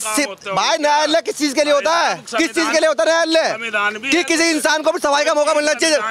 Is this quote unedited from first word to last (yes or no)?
yes